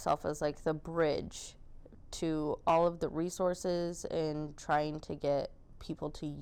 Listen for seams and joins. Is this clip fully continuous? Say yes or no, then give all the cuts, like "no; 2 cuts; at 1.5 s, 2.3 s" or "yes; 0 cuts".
yes; 0 cuts